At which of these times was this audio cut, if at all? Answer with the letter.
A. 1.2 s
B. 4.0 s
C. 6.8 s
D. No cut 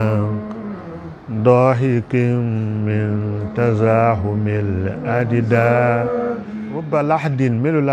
C